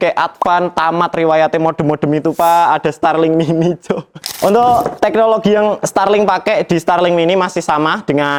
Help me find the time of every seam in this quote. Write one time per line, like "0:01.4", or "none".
none